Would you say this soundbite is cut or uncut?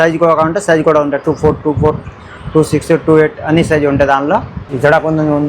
cut